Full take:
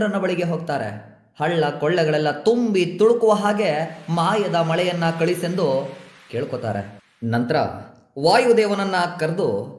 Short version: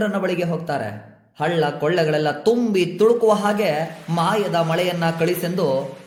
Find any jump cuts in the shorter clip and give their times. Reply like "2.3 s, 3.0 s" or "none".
none

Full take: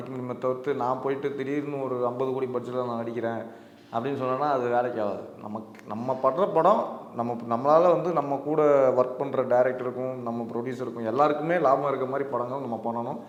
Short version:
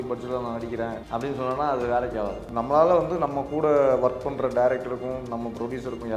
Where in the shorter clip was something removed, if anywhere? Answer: 1.0 s, 2.5 s

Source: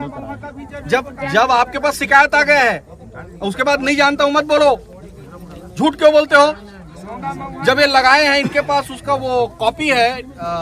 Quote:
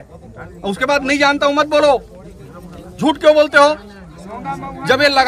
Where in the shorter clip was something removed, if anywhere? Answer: none

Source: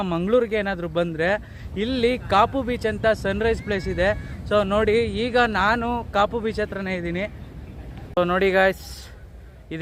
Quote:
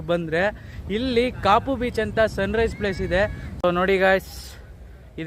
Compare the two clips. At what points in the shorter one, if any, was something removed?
3.4 s

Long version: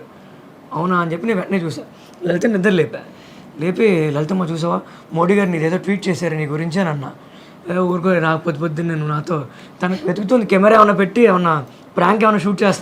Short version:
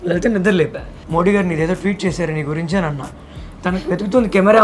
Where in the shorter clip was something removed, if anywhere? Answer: 0.9 s, 3.4 s

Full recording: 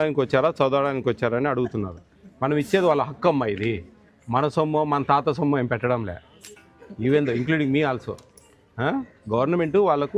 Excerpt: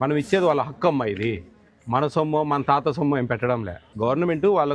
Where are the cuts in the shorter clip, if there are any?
3.8 s

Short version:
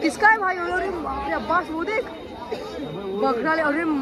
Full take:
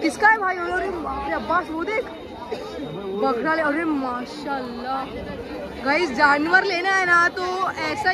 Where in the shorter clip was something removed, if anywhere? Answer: none

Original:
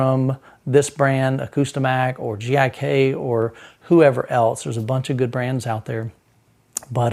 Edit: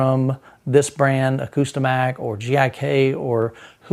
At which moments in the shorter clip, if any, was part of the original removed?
none

